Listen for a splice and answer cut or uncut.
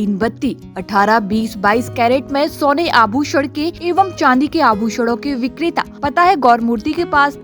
cut